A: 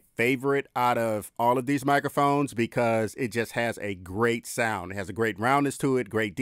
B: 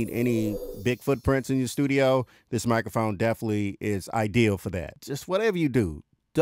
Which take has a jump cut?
B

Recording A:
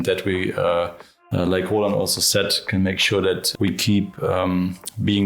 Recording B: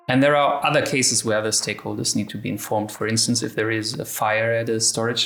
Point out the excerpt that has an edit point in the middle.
A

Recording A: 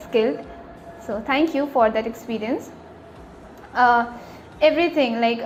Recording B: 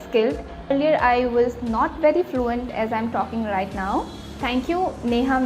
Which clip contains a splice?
B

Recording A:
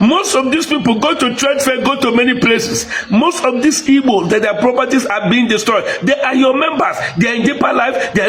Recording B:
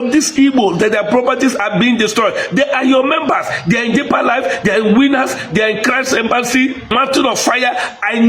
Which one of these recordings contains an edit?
B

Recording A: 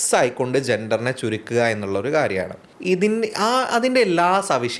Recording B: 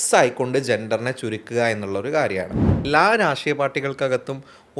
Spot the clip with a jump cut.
B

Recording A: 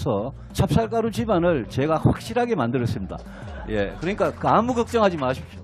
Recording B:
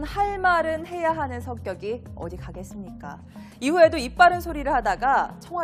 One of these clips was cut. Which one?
A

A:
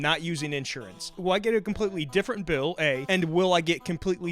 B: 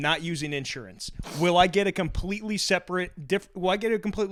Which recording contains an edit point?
A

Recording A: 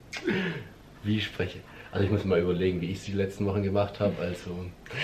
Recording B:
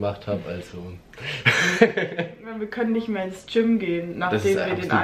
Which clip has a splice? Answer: B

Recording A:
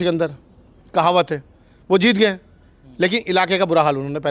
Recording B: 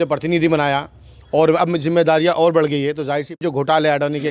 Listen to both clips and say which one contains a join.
B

